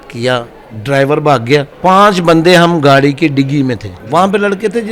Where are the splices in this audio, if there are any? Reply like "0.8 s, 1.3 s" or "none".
1.7 s, 3.9 s

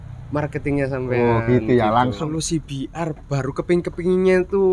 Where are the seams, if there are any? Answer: 2.1 s

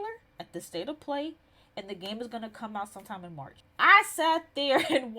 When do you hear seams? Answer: 3.6 s

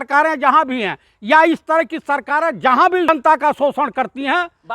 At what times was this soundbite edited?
3.1 s

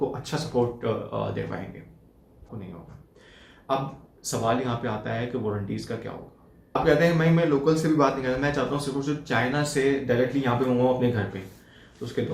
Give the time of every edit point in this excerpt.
2.5 s, 6.8 s

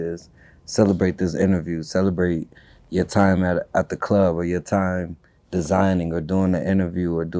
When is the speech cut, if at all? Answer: none

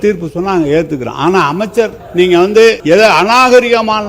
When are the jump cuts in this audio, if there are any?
2.0 s, 2.8 s

